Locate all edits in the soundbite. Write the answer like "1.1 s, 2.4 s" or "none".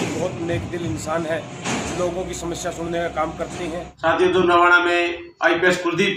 3.9 s